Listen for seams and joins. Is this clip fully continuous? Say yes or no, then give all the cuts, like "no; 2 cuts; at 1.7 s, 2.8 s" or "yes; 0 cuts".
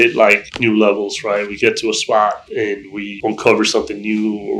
yes; 0 cuts